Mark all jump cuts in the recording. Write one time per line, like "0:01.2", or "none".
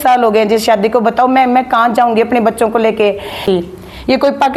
0:03.4